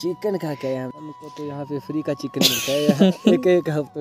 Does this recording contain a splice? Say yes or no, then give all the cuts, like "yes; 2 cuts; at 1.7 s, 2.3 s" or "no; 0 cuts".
yes; 1 cut; at 0.9 s